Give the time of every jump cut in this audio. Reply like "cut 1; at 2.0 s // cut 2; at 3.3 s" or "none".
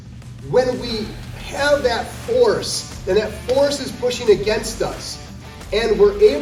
none